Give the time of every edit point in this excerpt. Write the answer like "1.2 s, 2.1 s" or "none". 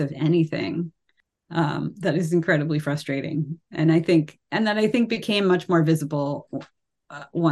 none